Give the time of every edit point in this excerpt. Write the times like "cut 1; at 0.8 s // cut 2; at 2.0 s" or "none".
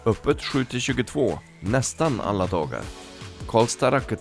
none